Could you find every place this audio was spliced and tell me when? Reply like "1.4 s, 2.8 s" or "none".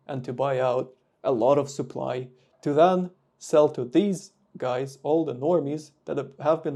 none